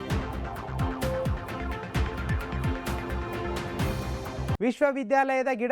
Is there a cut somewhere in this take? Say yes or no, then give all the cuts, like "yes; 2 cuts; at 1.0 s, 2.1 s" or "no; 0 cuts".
yes; 2 cuts; at 2.5 s, 4.1 s